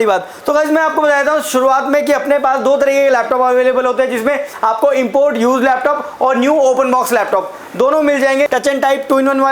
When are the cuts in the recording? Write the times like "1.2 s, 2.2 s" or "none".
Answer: 8.5 s